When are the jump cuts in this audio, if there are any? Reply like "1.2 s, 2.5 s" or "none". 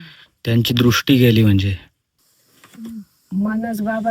2.1 s